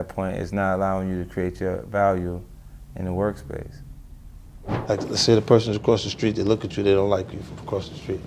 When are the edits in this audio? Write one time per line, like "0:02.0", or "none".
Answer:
0:04.7

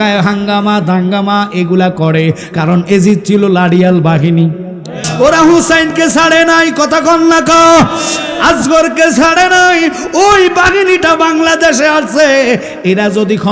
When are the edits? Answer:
0:05.0

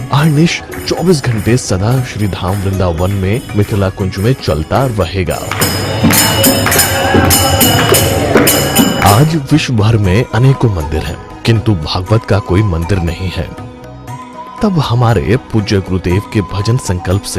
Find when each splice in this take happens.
0:15.7

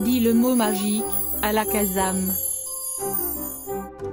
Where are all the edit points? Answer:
0:02.5

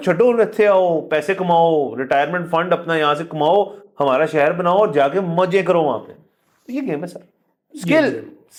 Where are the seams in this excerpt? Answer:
none

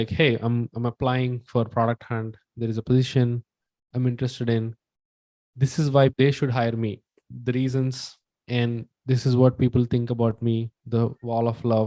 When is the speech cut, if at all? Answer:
0:06.1

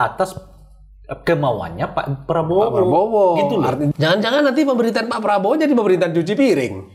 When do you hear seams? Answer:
0:03.9

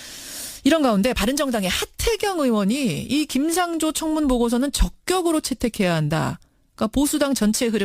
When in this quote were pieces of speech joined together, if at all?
0:02.0

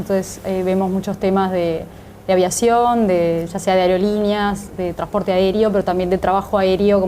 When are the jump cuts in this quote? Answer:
0:05.0

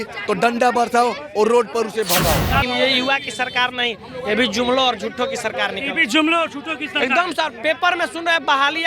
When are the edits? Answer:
0:02.6

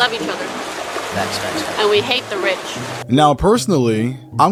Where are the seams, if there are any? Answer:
none

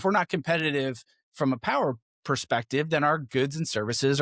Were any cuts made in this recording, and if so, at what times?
0:02.1

